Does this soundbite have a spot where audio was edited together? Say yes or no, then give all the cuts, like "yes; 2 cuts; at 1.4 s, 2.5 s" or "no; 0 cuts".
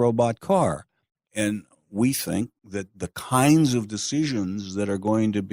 no; 0 cuts